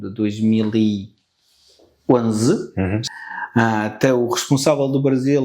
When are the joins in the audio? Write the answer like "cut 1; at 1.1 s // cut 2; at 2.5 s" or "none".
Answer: cut 1; at 3.0 s